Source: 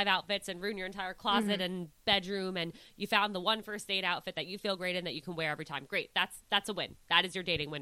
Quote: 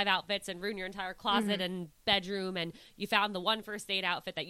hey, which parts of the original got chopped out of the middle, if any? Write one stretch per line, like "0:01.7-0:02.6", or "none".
none